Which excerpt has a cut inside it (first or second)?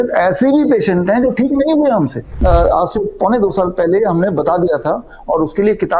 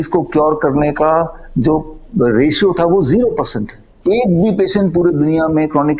first